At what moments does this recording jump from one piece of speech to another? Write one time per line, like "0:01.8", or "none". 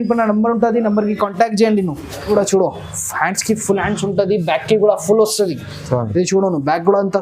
0:02.3